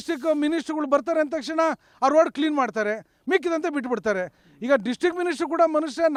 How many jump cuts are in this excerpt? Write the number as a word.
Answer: zero